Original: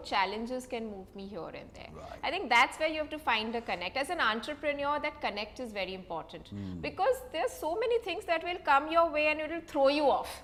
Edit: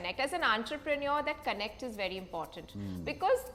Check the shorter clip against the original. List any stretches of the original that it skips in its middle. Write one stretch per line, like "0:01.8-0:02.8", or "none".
none